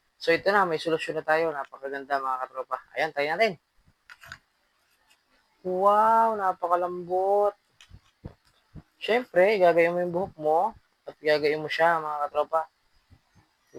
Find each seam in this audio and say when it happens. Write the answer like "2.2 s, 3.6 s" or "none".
none